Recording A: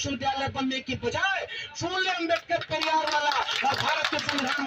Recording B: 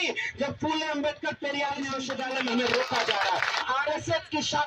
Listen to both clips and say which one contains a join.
B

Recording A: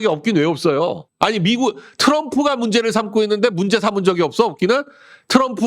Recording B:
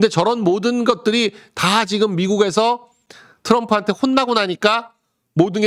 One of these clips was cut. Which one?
A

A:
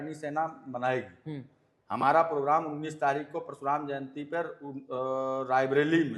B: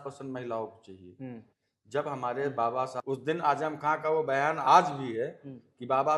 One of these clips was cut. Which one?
B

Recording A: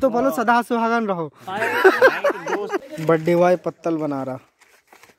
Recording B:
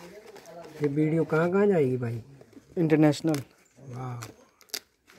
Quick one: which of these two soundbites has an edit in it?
A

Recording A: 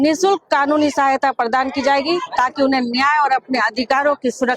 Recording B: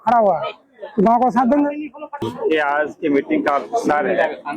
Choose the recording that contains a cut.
B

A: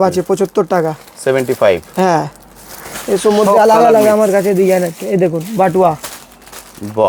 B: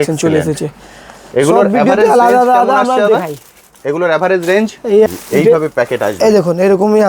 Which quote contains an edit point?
B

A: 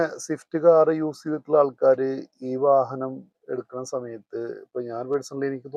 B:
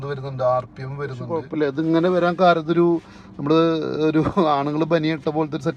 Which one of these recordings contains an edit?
B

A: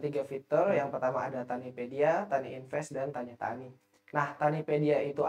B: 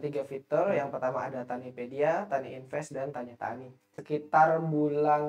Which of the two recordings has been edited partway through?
B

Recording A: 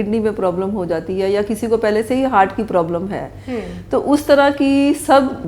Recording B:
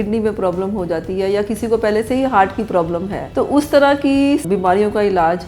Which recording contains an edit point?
B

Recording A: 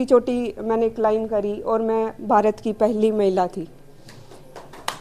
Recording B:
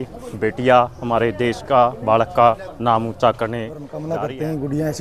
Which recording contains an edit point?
B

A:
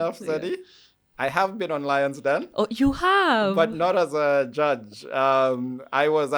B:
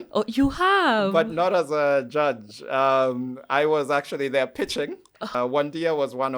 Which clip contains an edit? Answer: B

